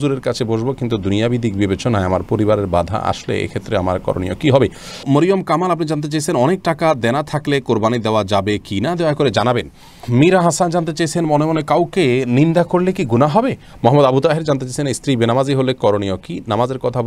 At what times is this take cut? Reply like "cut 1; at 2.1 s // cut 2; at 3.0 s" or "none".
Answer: cut 1; at 5.0 s // cut 2; at 10.0 s // cut 3; at 13.7 s